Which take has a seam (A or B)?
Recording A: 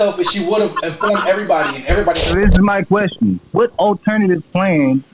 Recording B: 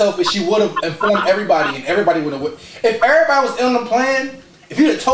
A